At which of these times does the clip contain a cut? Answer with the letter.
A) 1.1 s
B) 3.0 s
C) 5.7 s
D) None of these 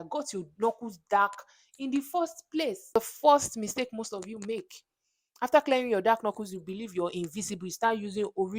B